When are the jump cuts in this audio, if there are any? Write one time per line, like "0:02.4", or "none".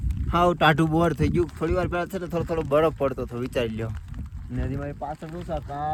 none

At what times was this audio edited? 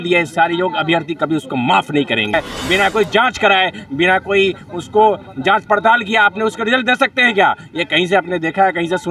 0:02.3

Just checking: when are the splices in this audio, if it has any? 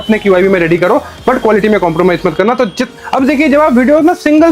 0:02.8

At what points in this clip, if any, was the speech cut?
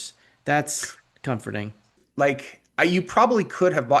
0:02.0

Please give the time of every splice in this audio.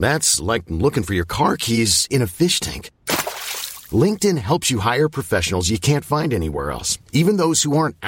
none

